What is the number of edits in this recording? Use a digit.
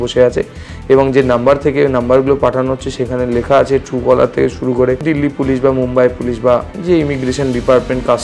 1